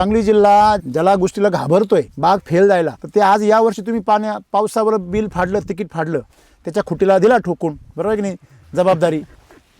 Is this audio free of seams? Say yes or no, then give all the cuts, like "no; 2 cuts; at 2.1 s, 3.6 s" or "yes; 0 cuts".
no; 3 cuts; at 0.8 s, 2.1 s, 3.0 s